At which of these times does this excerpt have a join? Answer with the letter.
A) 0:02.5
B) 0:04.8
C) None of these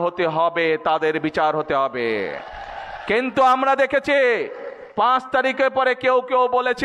C